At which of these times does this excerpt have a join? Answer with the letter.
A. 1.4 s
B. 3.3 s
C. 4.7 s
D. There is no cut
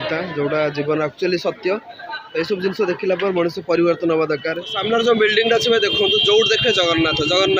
C